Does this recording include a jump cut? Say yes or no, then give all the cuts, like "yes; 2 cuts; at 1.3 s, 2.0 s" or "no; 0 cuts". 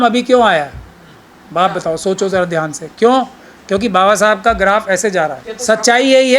yes; 1 cut; at 5.5 s